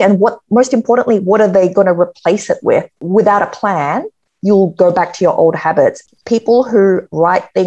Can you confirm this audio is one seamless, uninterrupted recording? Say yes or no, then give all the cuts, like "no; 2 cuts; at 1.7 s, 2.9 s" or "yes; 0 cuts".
no; 2 cuts; at 3.0 s, 6.0 s